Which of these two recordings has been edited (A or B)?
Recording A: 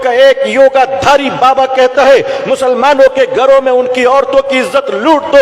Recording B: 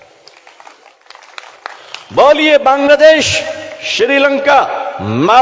B